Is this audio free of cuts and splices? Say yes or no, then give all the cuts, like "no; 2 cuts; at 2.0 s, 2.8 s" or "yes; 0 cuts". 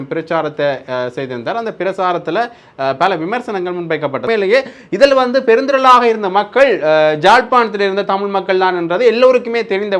no; 1 cut; at 4.2 s